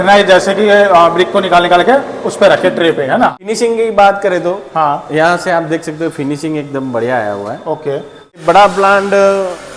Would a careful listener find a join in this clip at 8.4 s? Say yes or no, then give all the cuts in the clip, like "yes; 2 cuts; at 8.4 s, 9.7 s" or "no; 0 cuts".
yes; 2 cuts; at 3.4 s, 8.4 s